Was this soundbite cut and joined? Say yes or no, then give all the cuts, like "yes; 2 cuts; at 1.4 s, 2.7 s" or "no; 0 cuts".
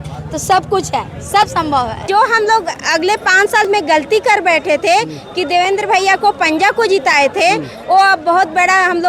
yes; 1 cut; at 2.1 s